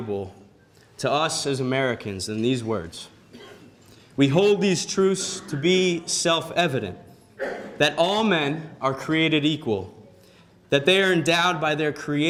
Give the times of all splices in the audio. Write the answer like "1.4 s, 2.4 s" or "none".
none